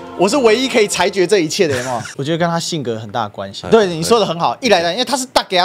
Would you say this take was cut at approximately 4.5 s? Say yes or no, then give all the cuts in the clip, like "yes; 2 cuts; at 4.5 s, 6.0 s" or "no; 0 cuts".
no; 1 cut; at 2.1 s